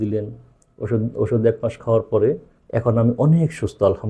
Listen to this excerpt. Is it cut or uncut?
uncut